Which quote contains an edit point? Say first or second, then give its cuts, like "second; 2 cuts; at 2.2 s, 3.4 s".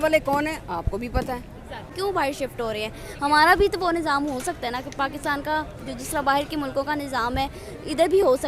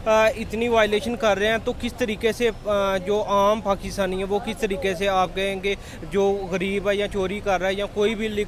first; 1 cut; at 1.9 s